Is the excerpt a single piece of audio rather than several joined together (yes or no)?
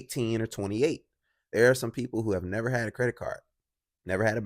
yes